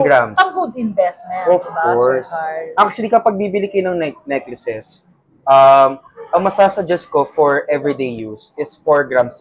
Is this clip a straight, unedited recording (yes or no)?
yes